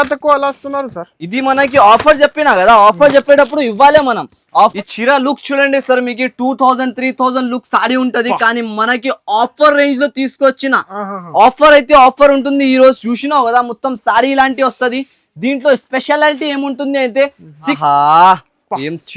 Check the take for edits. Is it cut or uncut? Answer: cut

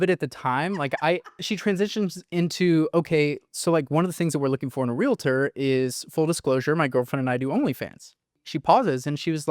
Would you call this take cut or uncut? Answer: cut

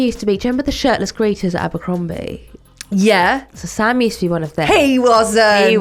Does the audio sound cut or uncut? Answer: uncut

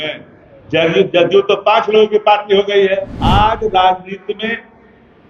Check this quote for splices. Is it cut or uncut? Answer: cut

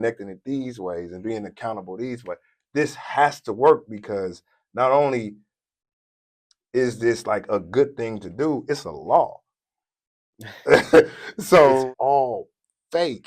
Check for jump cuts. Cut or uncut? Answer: cut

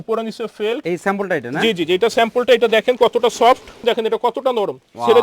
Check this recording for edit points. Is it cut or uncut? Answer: cut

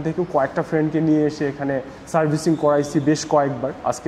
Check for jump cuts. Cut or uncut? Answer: uncut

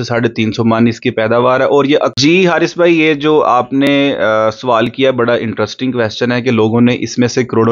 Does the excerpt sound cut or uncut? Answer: cut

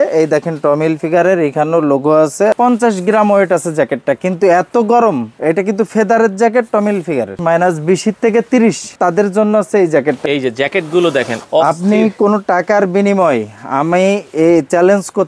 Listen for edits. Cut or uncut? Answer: cut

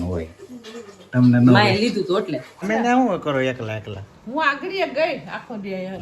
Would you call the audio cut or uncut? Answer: cut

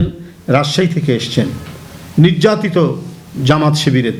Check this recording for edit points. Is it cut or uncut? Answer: uncut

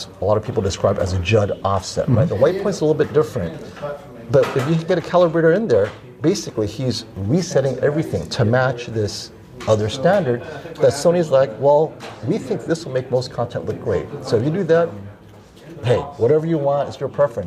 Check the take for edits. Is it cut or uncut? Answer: uncut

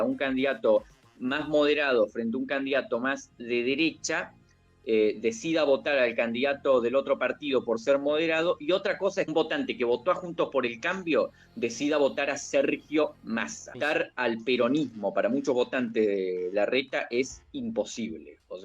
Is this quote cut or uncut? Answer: cut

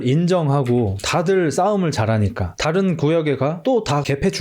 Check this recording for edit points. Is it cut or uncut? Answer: uncut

